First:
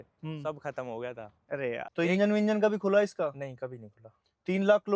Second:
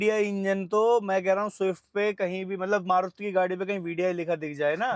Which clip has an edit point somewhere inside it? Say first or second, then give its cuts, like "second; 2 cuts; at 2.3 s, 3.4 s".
first; 1 cut; at 1.9 s